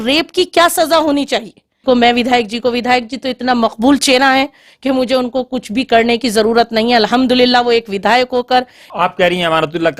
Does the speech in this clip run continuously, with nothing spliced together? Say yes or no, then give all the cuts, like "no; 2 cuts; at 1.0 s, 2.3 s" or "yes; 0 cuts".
no; 2 cuts; at 1.8 s, 8.9 s